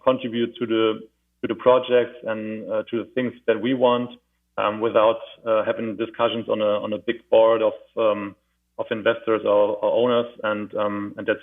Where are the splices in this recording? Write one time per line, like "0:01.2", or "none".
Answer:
none